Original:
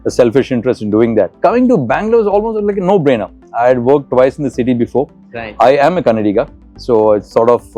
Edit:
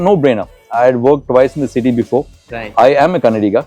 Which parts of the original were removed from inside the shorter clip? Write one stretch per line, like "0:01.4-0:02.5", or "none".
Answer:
none